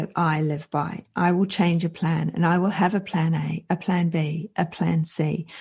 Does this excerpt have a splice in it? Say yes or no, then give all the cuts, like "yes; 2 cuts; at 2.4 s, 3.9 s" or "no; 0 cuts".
no; 0 cuts